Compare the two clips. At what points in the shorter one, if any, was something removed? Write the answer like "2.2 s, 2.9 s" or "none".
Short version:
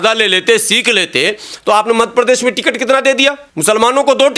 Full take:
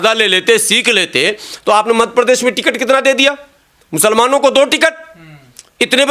3.5 s